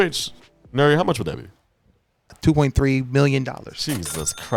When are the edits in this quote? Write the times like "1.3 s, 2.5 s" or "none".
2.4 s